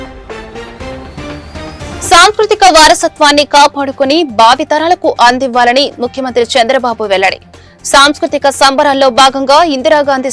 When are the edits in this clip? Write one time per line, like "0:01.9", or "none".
0:01.8